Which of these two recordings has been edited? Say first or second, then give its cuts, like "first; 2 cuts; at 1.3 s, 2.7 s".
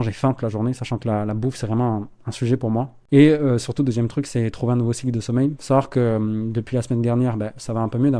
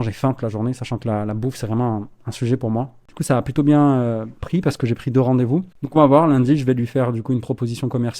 second; 2 cuts; at 3.0 s, 5.8 s